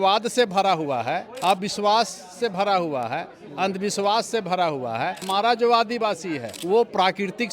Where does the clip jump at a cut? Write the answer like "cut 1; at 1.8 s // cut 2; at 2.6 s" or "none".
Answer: cut 1; at 1.3 s // cut 2; at 5.2 s // cut 3; at 6.5 s